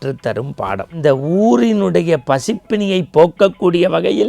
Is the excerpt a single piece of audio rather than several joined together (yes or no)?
no